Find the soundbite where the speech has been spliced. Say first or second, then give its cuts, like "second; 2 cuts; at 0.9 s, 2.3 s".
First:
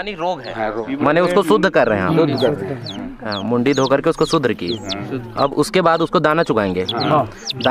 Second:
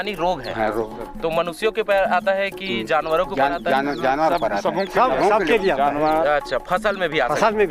first; 1 cut; at 0.9 s